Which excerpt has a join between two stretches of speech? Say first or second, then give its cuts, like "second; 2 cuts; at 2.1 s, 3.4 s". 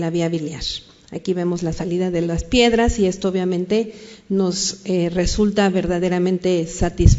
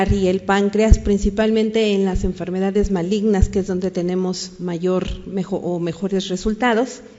first; 1 cut; at 3.1 s